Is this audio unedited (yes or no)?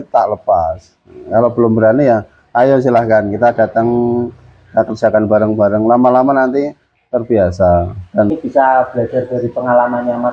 no